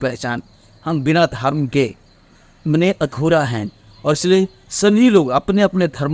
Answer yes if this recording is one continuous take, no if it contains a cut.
yes